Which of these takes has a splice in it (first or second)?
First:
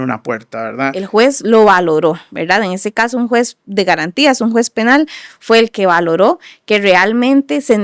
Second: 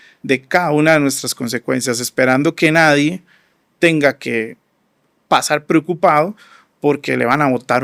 first